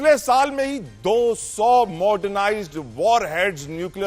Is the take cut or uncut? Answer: uncut